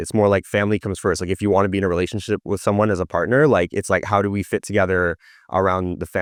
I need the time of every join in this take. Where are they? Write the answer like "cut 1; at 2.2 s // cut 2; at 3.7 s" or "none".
none